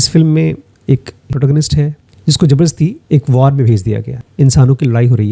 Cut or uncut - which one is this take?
cut